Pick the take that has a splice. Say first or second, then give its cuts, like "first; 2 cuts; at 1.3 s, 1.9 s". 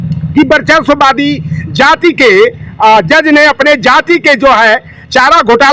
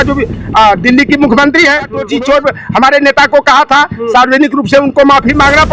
second; 1 cut; at 2.1 s